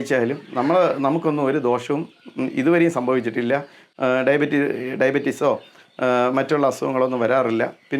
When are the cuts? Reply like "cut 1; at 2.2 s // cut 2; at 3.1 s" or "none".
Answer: none